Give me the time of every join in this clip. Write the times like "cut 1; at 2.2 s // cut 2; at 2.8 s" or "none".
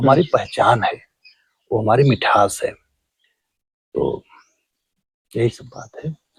none